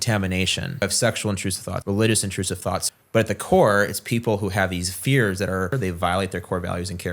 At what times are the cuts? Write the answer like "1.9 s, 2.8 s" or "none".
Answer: 0.8 s, 1.7 s, 2.8 s, 5.8 s